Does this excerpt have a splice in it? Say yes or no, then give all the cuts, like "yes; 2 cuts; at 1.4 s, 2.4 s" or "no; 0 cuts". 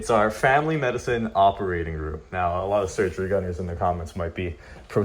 no; 0 cuts